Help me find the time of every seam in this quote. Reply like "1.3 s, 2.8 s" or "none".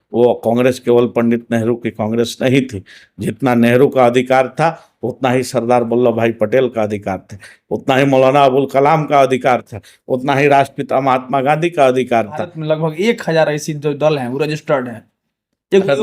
12.5 s